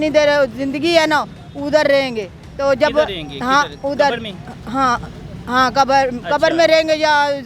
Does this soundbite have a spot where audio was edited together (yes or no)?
no